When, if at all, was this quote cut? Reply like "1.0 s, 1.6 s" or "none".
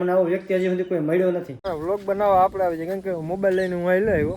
1.5 s